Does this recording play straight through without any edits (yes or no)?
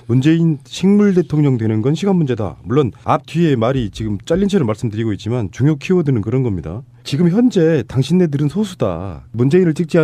yes